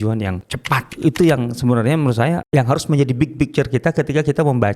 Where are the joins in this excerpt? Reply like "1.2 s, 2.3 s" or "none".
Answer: 0.9 s, 2.4 s